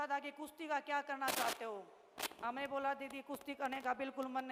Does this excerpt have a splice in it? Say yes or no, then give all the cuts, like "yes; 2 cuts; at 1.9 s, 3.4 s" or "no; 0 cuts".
no; 0 cuts